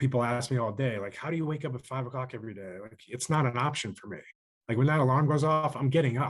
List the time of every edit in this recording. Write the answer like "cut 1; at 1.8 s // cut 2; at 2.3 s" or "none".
none

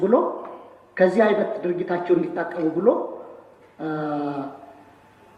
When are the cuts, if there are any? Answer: none

